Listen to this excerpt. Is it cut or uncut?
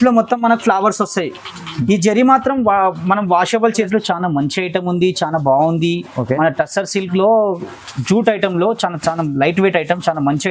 cut